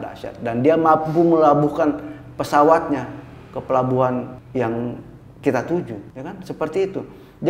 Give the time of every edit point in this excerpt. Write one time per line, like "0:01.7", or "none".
0:04.4
0:06.1